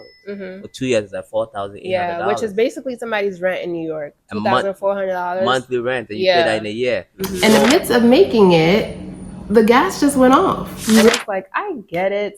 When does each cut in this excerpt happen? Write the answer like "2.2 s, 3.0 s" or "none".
7.3 s, 11.1 s